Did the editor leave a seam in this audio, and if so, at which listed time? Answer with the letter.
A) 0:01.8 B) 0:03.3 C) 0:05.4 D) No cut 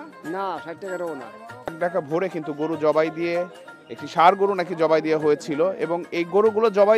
A